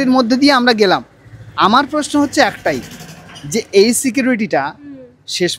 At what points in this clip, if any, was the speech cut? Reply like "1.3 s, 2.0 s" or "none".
none